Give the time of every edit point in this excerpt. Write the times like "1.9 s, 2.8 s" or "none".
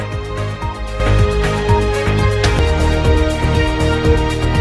0.9 s